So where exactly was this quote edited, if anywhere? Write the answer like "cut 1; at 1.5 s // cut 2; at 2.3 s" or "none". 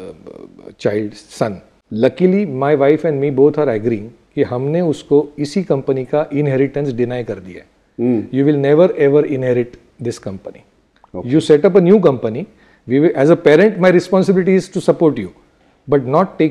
cut 1; at 1.7 s